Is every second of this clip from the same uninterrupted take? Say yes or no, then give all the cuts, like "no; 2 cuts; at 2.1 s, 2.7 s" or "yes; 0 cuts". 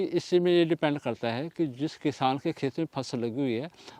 yes; 0 cuts